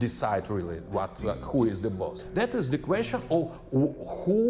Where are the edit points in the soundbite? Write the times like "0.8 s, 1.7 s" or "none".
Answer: 2.2 s

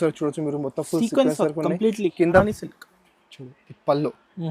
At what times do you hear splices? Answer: 2.4 s

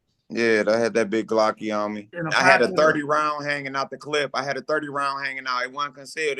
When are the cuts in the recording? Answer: 2.1 s

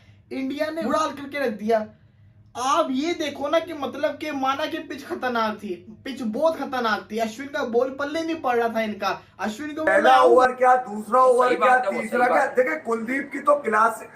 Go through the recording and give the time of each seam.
9.9 s

